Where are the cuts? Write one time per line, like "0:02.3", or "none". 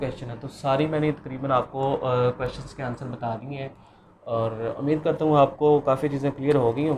none